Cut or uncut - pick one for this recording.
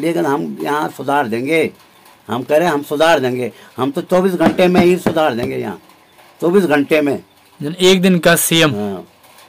uncut